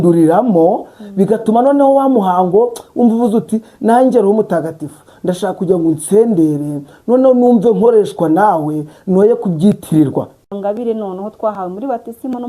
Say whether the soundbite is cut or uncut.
cut